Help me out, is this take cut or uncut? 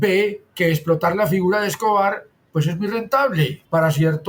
uncut